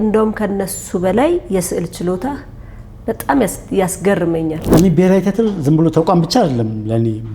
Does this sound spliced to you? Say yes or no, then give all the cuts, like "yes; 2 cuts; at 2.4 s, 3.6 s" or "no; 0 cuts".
yes; 1 cut; at 4.6 s